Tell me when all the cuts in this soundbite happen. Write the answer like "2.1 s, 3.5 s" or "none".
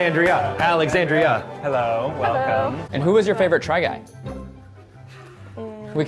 none

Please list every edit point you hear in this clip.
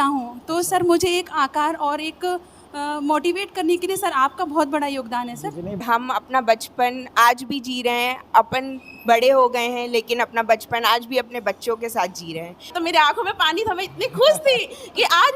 5.8 s, 12.7 s

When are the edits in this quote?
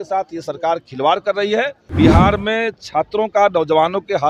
1.8 s

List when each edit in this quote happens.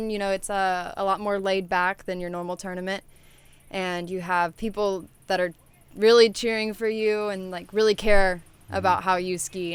none

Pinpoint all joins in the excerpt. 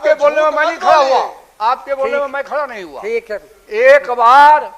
none

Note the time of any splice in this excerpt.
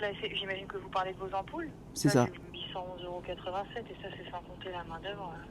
2.6 s

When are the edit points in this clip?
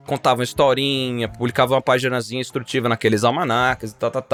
none

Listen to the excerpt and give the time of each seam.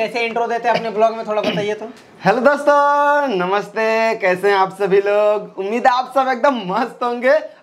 none

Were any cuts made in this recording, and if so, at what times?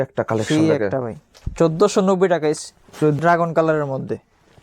3.2 s

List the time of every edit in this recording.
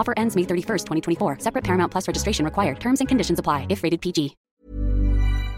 4.5 s

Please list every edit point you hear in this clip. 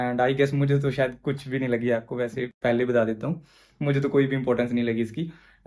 none

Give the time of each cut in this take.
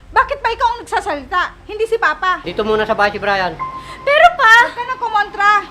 2.5 s

